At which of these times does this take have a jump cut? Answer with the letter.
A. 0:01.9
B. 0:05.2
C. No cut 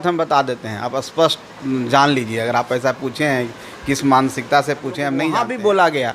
B